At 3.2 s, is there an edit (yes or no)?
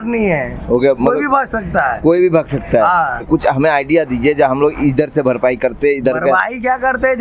yes